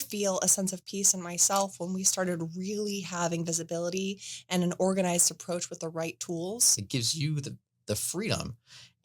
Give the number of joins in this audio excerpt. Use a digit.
1